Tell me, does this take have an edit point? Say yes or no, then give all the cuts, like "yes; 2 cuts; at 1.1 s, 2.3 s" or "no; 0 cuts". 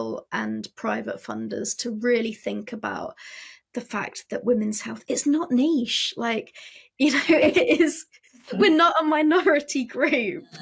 no; 0 cuts